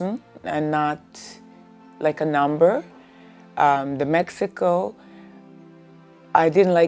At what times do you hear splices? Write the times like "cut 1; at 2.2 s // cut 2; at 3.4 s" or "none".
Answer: none